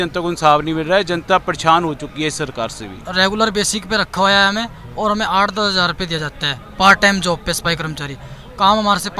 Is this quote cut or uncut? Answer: cut